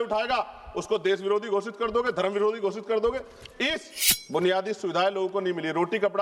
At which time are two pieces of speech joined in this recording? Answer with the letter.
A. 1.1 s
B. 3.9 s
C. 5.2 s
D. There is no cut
B